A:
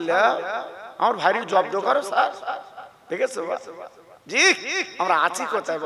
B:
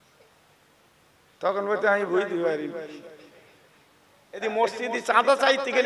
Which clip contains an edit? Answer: B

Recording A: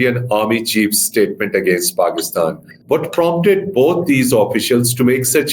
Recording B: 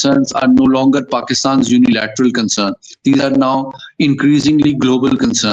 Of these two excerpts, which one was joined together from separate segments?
A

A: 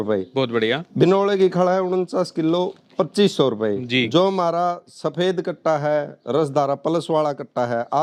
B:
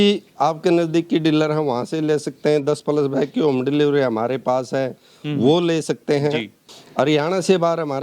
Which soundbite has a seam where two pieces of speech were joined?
B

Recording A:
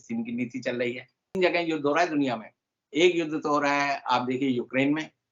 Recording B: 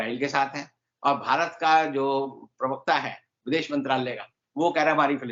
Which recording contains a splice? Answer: A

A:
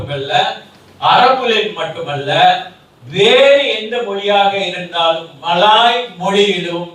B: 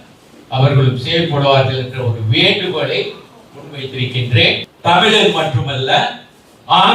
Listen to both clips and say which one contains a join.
B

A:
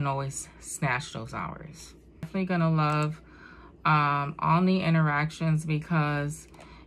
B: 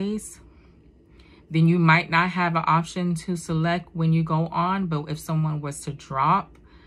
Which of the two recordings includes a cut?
A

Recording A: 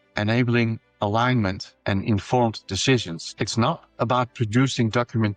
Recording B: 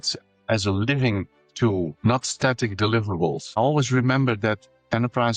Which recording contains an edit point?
B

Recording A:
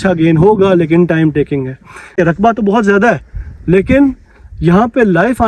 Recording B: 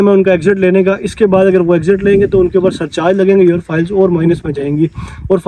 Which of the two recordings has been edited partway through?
A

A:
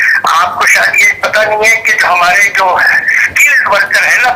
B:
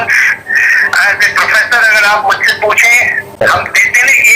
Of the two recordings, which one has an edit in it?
B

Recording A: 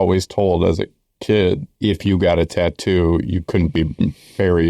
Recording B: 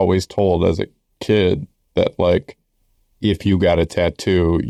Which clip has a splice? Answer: A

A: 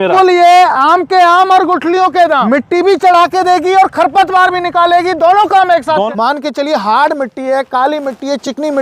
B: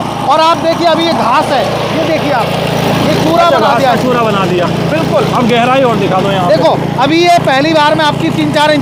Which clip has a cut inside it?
A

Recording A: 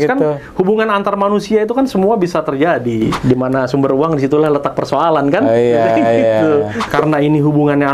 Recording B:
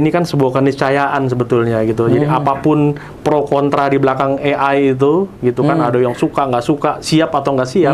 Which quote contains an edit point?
A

